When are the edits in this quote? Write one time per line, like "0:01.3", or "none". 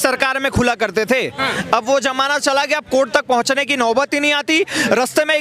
none

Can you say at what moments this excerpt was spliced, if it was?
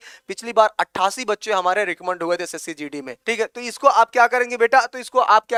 none

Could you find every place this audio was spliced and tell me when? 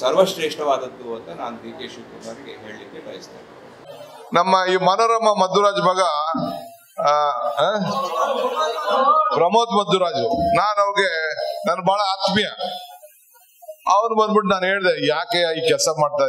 0:03.8

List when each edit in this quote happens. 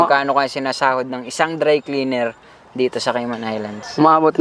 none

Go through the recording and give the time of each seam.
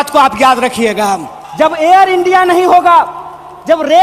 0:01.4

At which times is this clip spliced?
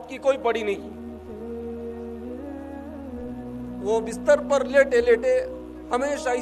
none

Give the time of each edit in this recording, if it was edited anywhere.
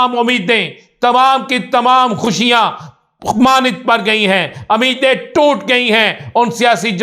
none

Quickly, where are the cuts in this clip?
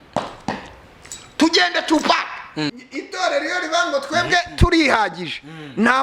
0:02.9

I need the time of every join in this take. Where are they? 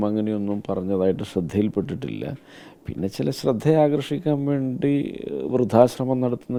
none

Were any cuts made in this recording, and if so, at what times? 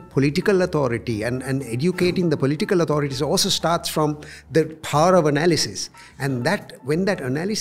none

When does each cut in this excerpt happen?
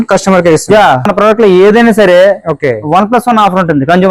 0:01.1

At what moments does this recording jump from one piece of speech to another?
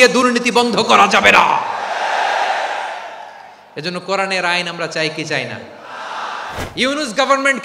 0:06.6

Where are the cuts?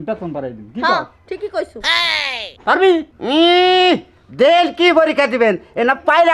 0:03.1

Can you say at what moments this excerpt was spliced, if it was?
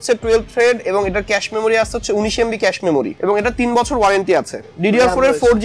0:03.1
0:04.7

